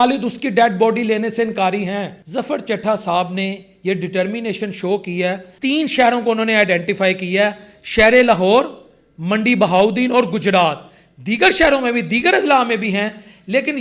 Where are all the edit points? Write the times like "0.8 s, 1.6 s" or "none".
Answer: 2.2 s, 5.5 s